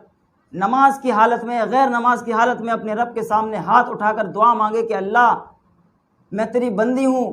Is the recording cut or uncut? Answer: uncut